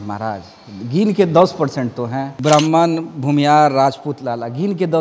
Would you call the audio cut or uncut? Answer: uncut